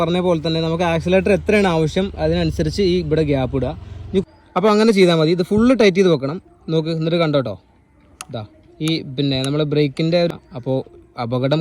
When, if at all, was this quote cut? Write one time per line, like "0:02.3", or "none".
0:04.2
0:10.3